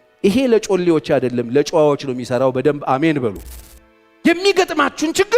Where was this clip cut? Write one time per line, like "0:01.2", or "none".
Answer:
0:03.6